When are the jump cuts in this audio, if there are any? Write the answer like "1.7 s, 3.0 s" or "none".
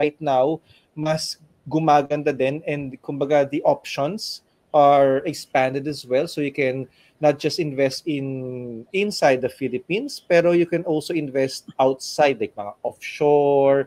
none